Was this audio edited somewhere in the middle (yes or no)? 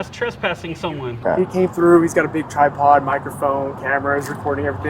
yes